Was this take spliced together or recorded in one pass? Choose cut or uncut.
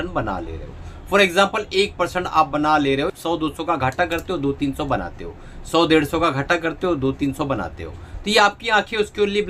cut